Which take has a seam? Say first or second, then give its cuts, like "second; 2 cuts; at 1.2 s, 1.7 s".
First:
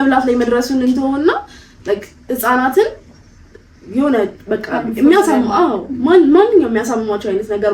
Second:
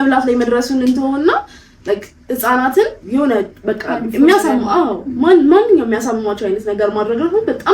second; 1 cut; at 3.0 s